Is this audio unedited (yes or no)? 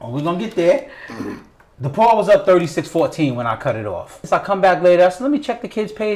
no